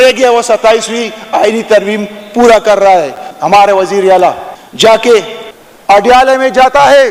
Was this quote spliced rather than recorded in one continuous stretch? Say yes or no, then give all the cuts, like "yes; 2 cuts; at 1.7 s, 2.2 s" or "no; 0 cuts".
no; 0 cuts